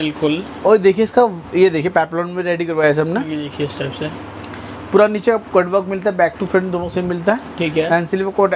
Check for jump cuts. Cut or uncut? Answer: uncut